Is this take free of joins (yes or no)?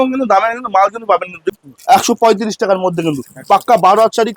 no